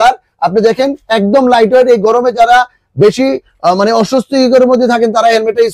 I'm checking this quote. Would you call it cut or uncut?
uncut